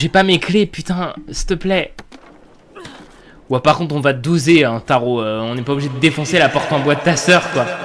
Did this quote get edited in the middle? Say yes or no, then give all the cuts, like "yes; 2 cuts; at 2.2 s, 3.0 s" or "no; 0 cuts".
no; 0 cuts